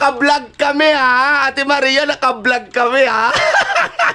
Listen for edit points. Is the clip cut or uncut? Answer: cut